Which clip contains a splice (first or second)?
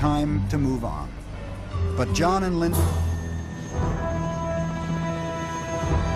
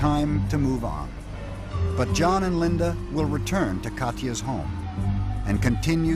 second